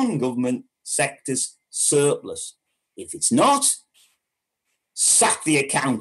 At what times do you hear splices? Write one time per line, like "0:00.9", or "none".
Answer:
none